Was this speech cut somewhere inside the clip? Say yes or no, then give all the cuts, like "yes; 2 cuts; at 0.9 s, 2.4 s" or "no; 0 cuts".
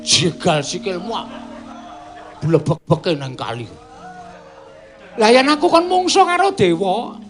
no; 0 cuts